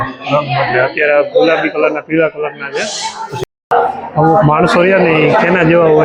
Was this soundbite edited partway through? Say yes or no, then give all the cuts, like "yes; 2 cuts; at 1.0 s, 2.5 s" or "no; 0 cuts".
yes; 1 cut; at 3.3 s